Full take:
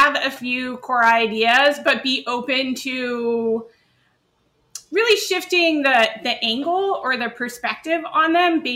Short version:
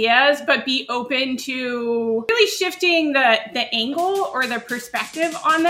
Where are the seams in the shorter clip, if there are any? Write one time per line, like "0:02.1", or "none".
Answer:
0:02.3